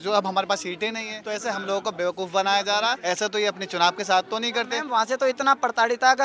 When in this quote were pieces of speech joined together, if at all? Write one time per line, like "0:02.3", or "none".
0:01.1
0:03.0
0:04.8